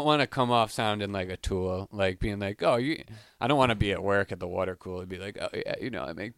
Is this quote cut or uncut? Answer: uncut